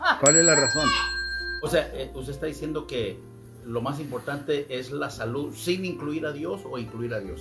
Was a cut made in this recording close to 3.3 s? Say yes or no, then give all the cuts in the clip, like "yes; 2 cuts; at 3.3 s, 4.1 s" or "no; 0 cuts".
no; 1 cut; at 1.6 s